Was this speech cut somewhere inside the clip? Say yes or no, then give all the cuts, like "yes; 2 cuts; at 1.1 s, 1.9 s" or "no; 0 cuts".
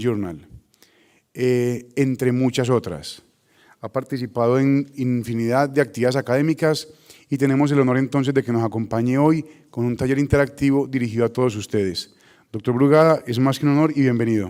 no; 0 cuts